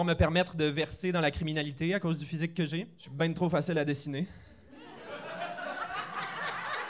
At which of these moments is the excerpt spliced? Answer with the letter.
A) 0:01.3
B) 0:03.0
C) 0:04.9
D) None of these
B